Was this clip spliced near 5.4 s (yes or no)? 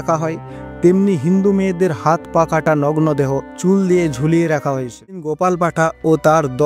yes